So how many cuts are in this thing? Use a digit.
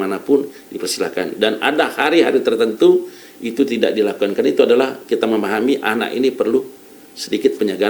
0